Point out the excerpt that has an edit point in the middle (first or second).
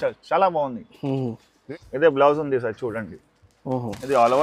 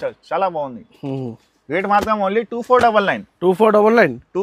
first